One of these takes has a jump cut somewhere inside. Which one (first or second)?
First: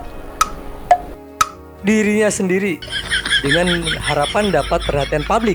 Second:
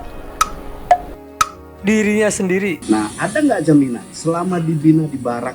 second